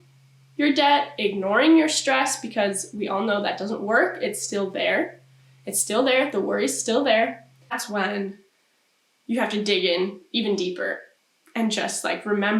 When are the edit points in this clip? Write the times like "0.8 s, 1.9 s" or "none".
7.8 s